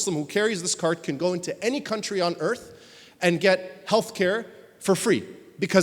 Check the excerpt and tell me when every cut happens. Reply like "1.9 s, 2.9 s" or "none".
none